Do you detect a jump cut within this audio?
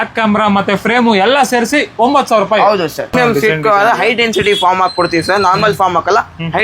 yes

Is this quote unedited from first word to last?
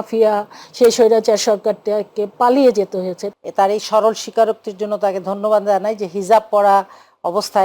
no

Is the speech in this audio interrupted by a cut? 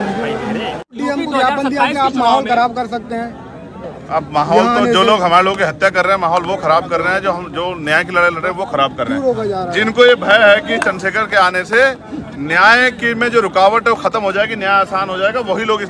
yes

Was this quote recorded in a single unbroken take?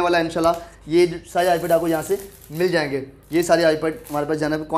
yes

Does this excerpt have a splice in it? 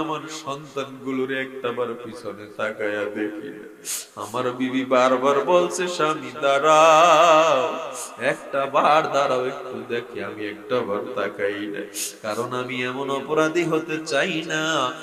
no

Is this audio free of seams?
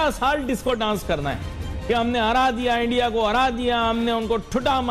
yes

